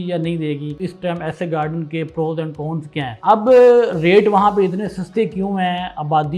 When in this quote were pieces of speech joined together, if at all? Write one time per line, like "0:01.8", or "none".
0:00.8
0:03.0